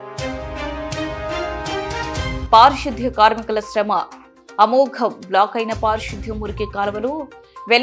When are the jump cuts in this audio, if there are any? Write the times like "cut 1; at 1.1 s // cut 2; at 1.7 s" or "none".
cut 1; at 2.4 s